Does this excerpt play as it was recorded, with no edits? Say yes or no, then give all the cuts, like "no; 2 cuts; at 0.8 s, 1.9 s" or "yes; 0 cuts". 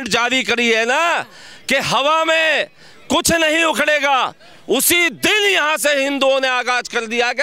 yes; 0 cuts